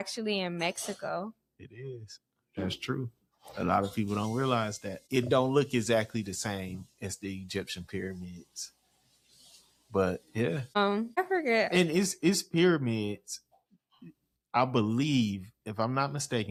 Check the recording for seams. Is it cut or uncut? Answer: uncut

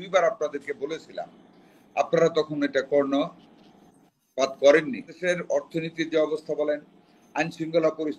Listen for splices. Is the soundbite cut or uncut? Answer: cut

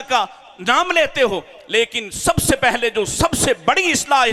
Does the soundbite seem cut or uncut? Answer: uncut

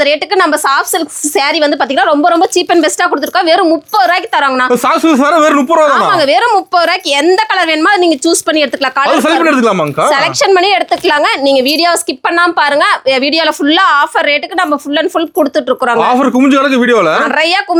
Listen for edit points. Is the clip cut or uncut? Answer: uncut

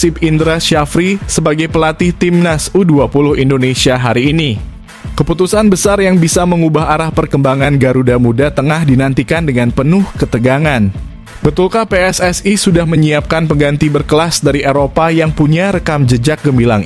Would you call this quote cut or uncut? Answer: uncut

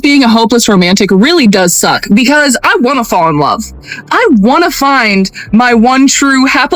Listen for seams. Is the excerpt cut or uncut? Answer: uncut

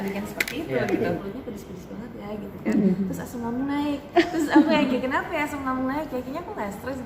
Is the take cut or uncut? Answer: cut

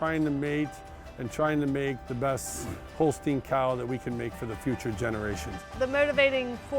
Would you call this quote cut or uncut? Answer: cut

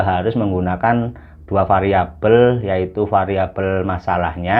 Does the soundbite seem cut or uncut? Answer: uncut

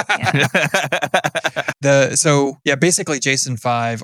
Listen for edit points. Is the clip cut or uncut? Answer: cut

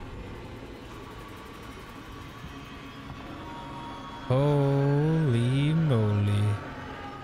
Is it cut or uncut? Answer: uncut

